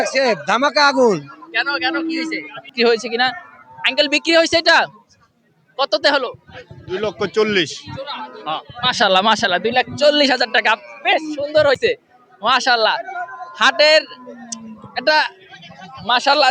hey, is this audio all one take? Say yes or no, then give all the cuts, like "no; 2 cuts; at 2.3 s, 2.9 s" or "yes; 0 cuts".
no; 1 cut; at 2.6 s